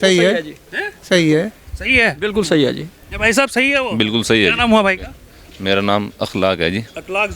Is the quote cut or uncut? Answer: uncut